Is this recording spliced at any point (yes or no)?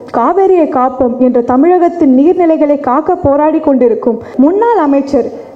yes